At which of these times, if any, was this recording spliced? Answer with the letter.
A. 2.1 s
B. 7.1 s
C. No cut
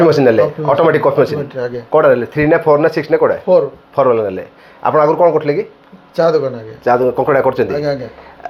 C